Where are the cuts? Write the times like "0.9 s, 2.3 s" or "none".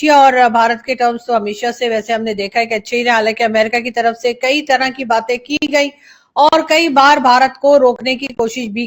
none